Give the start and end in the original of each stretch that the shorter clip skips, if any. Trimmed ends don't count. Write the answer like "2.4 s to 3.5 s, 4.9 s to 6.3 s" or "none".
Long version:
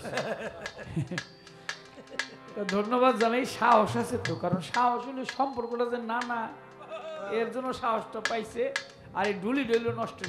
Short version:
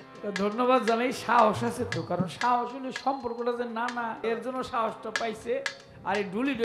6.5 s to 7.3 s